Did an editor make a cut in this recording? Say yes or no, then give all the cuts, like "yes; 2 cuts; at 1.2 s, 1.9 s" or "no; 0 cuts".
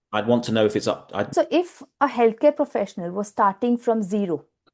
yes; 1 cut; at 1.3 s